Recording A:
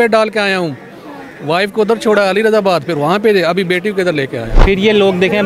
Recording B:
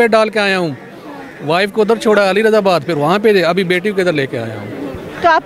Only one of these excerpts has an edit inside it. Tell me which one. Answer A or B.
A